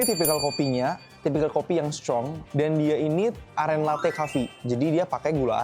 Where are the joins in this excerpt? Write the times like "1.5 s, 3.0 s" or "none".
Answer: 1.1 s, 2.4 s